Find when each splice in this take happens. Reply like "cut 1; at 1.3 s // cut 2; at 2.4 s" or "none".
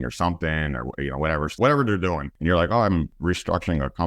cut 1; at 1.6 s // cut 2; at 2.3 s // cut 3; at 3.1 s

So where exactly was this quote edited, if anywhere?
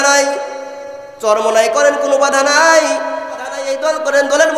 cut 1; at 3.7 s

